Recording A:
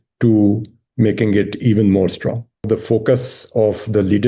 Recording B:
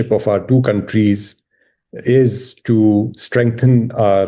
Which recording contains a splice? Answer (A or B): A